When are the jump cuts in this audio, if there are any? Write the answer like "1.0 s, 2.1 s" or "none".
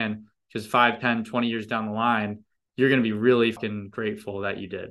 3.6 s